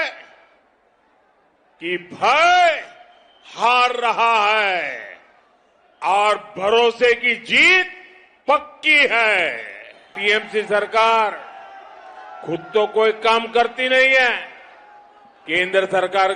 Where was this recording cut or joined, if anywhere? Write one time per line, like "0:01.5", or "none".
0:10.1